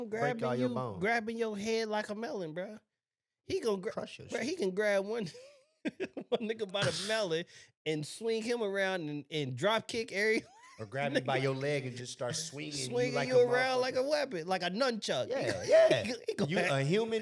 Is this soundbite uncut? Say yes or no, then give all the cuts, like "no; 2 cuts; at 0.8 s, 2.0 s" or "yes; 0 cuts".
yes; 0 cuts